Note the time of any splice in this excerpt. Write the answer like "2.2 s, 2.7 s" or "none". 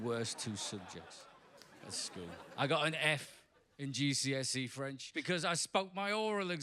5.1 s

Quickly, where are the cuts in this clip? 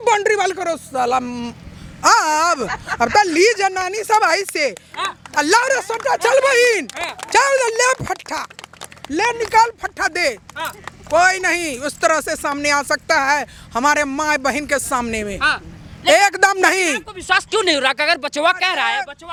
none

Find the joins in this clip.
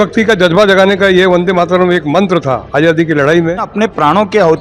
3.7 s

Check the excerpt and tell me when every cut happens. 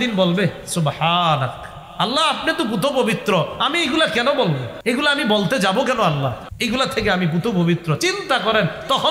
4.7 s, 6.5 s

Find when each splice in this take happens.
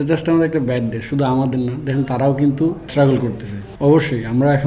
2.8 s, 3.6 s

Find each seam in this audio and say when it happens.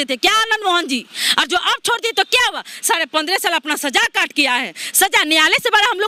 none

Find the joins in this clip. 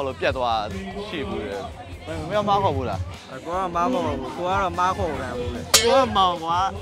2.0 s, 5.7 s

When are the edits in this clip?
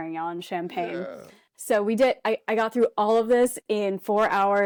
none

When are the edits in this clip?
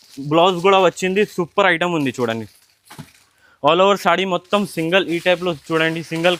none

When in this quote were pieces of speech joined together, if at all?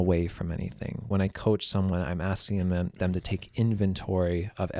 1.1 s

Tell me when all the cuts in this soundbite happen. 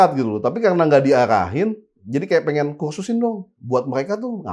none

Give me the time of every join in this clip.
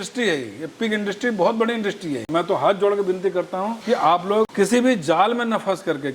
2.3 s, 3.8 s, 4.5 s

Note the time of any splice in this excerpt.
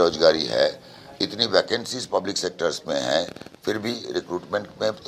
none

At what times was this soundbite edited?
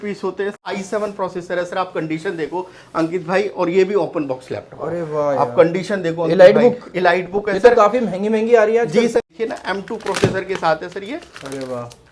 0.7 s, 9.2 s

